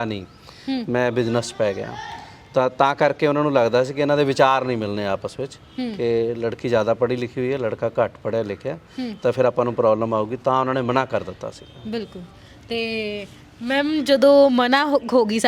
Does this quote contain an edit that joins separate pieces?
no; 0 cuts

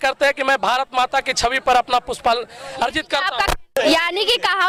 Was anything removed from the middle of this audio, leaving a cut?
no; 0 cuts

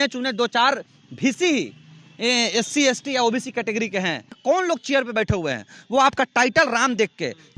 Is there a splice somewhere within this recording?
yes; 1 cut; at 4.3 s

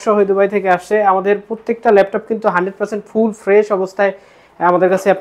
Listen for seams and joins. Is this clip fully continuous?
yes; 0 cuts

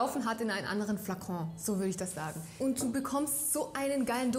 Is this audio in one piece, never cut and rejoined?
no; 1 cut; at 2.5 s

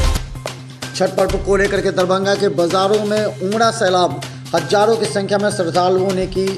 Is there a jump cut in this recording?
yes; 1 cut; at 1.0 s

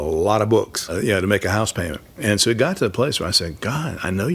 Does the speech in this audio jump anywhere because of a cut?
yes; 1 cut; at 0.9 s

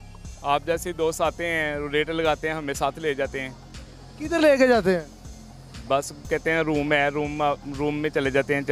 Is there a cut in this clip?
no; 0 cuts

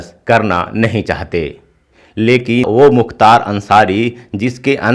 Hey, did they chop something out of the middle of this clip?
yes; 1 cut; at 2.6 s

